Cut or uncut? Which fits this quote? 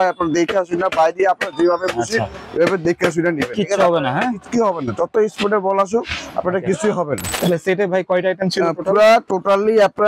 cut